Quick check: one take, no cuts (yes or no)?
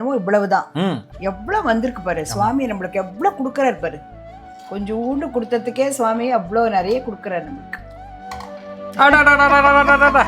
yes